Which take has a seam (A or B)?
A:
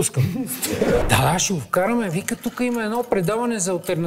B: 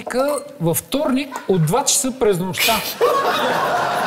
A